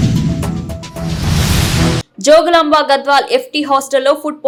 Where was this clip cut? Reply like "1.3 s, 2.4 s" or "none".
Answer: none

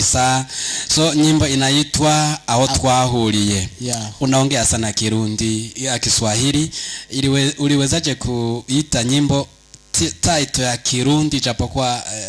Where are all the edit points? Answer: none

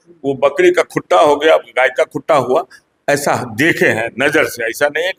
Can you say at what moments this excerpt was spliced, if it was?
none

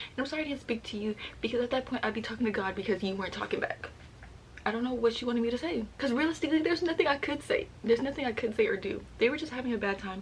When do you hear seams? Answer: none

